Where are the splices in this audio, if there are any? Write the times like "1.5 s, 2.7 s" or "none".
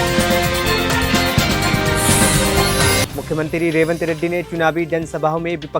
none